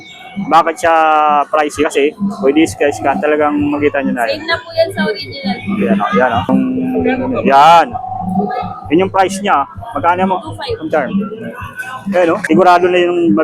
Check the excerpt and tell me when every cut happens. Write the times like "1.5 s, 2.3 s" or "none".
6.5 s, 12.4 s